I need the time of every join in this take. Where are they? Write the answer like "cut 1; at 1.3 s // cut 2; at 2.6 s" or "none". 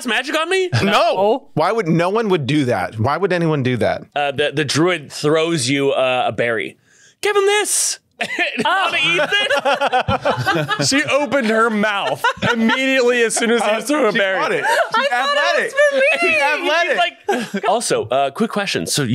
cut 1; at 4.1 s // cut 2; at 17.5 s